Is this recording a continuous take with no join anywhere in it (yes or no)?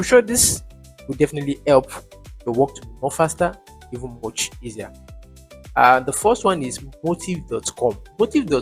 yes